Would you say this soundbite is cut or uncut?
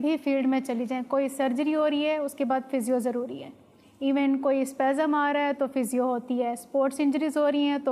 uncut